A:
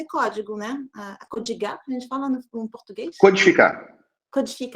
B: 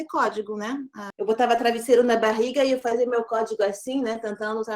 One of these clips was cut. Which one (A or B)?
B